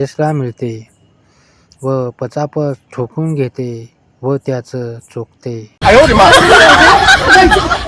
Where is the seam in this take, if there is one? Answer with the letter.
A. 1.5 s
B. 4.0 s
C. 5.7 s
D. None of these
C